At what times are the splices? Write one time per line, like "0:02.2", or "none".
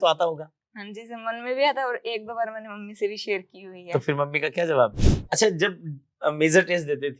0:05.1